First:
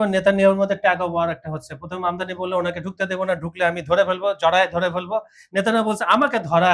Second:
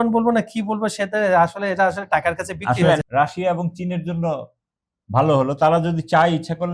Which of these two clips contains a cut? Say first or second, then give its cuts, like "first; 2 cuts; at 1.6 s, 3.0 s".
second; 1 cut; at 3.0 s